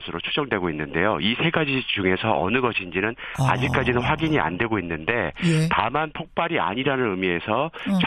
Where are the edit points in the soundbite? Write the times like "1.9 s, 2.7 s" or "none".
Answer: 2.1 s